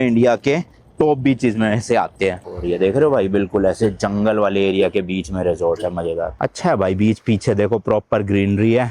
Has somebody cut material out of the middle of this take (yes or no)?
yes